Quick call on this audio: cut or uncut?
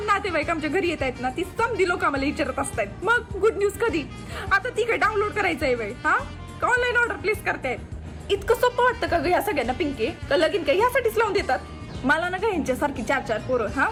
uncut